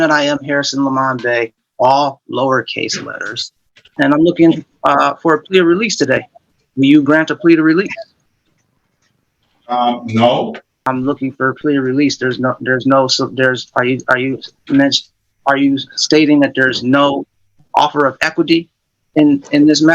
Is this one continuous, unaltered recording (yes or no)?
no